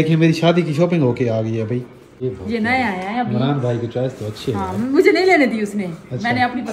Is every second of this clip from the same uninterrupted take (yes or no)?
no